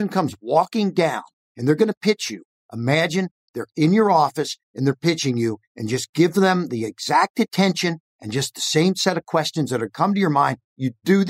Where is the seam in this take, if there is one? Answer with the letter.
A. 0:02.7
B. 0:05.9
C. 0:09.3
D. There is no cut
D